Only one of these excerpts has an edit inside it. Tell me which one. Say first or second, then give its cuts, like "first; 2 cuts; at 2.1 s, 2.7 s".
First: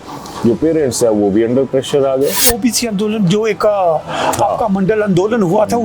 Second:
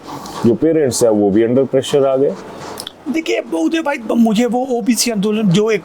first; 1 cut; at 2.4 s